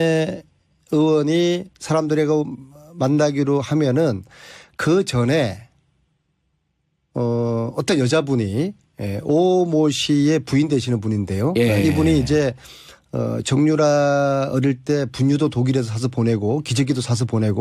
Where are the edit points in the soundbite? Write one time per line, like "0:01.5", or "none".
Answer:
0:11.3